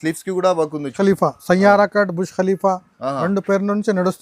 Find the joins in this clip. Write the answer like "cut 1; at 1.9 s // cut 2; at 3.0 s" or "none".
cut 1; at 0.9 s